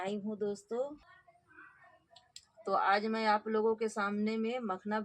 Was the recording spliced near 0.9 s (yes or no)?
yes